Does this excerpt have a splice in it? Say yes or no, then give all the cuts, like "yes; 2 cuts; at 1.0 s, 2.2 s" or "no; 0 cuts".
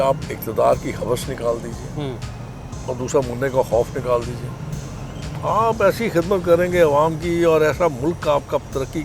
no; 0 cuts